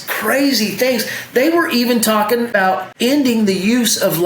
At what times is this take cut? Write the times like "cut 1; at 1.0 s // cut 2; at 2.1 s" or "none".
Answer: cut 1; at 2.5 s